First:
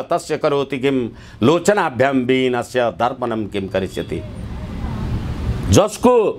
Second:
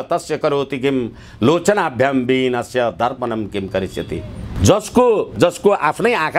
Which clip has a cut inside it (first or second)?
second